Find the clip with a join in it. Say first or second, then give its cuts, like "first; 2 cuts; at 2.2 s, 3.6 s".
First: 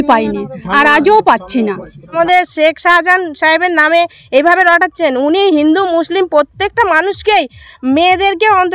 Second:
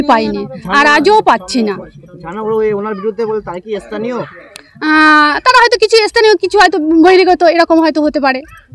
first; 1 cut; at 2.1 s